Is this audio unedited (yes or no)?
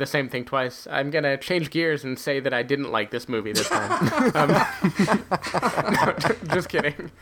yes